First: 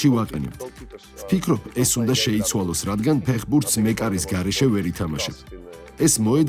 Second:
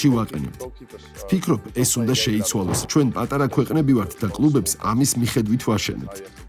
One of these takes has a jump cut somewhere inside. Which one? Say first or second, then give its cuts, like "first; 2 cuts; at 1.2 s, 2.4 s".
second; 1 cut; at 2.8 s